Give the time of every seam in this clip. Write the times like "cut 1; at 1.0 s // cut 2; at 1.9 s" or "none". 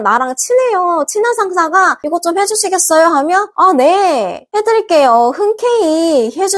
none